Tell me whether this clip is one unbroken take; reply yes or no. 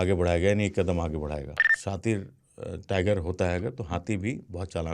no